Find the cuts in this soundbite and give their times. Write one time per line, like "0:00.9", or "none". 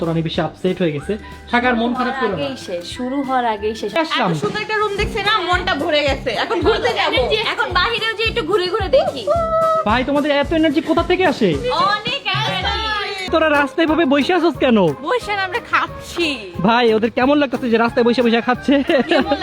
0:04.0
0:13.3

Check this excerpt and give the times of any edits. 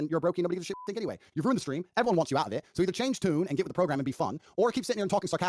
none

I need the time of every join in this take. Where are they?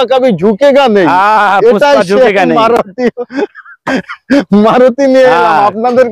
none

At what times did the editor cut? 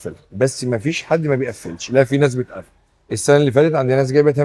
none

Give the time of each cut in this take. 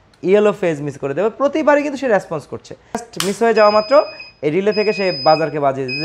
0:02.9

